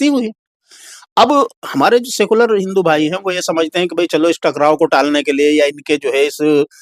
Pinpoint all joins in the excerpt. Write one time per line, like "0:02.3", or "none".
none

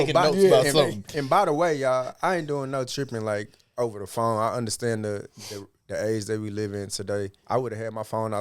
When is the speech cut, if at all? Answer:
0:07.4

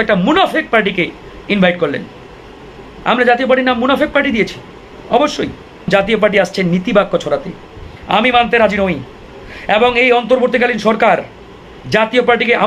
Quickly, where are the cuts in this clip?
0:05.9

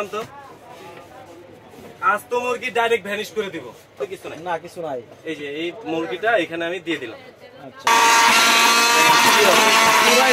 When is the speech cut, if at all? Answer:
0:04.0
0:07.9

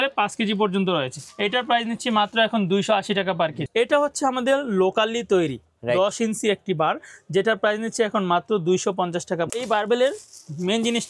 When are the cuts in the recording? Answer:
0:01.2
0:03.6
0:09.5

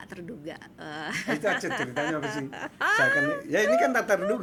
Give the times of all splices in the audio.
none

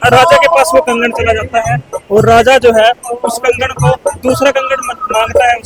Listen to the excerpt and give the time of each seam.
none

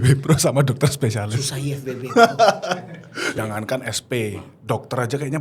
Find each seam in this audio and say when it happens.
0:03.4

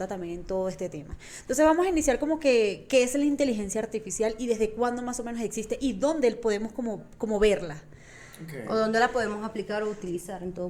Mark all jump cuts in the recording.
none

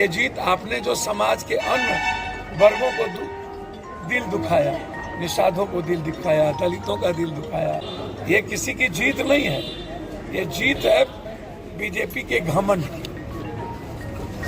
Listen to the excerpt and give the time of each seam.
0:07.9

